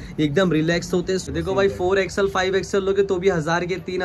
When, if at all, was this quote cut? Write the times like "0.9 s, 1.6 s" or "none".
1.3 s